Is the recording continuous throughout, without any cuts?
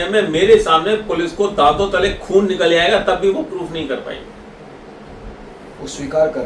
yes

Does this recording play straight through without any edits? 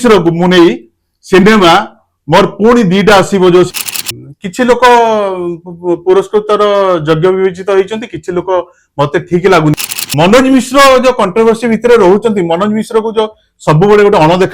no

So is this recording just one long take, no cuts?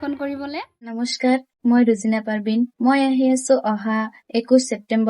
no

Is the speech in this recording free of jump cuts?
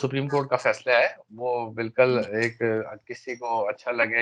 yes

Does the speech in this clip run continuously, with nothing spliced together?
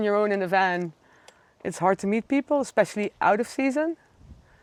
yes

